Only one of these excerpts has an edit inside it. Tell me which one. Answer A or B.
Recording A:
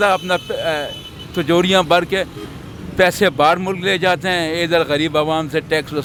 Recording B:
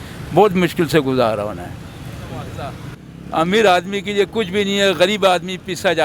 B